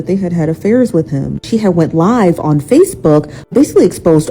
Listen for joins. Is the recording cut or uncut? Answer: cut